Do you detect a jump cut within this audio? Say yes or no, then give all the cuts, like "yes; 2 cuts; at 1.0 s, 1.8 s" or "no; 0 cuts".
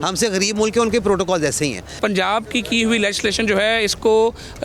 yes; 1 cut; at 2.0 s